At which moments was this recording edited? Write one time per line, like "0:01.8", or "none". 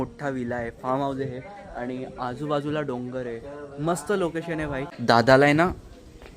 0:04.9